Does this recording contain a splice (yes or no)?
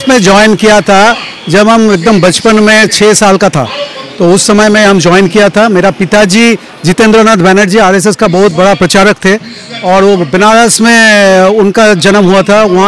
no